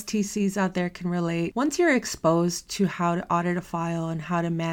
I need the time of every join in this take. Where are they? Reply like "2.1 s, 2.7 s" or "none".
1.5 s